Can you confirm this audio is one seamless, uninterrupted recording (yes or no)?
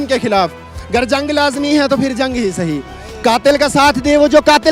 yes